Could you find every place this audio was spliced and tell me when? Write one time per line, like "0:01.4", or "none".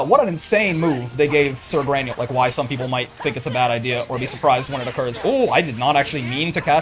0:02.1